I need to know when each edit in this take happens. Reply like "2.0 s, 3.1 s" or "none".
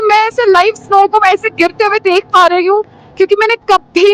none